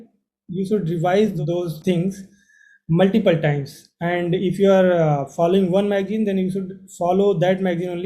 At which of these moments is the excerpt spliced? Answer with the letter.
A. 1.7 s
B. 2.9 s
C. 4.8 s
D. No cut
A